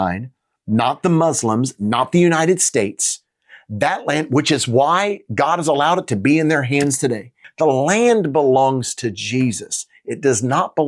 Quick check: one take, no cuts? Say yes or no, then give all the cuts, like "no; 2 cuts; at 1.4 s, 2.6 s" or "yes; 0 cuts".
no; 1 cut; at 7.4 s